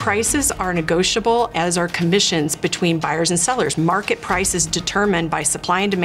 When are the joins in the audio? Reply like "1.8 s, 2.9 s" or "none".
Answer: none